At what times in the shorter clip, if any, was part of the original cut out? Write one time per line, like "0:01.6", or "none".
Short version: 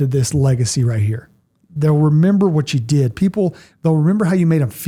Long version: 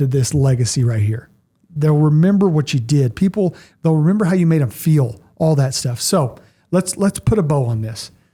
none